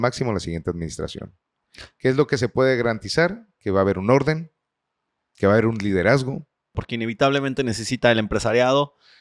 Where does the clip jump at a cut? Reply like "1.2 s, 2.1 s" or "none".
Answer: 6.9 s